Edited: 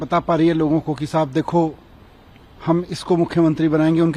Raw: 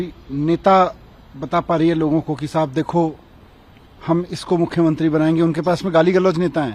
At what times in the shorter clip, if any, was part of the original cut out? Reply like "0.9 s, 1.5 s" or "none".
none